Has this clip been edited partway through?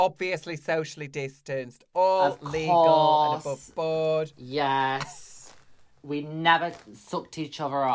no; 0 cuts

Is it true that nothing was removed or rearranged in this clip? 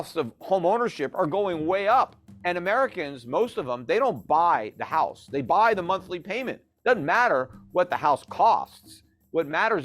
no; 1 cut; at 2.3 s

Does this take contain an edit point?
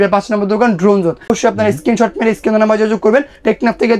yes; 1 cut; at 1.3 s

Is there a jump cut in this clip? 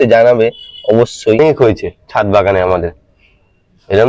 yes; 1 cut; at 1.4 s

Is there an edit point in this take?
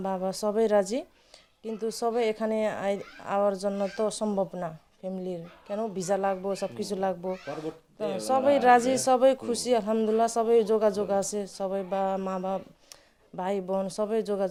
no; 0 cuts

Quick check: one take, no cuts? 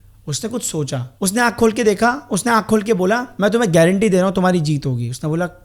no; 2 cuts; at 1.1 s, 3.3 s

